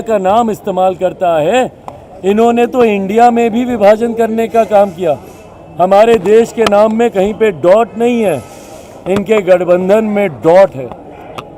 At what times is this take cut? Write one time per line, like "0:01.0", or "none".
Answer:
none